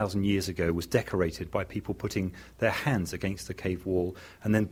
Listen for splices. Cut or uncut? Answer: uncut